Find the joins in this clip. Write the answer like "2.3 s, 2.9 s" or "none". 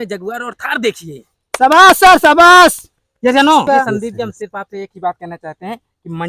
3.7 s